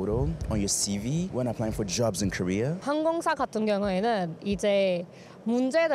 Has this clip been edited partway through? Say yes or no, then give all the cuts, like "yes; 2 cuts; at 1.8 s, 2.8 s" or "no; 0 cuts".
yes; 2 cuts; at 1.3 s, 2.8 s